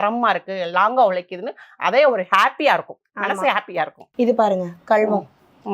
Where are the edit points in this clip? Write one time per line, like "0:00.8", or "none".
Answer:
0:04.0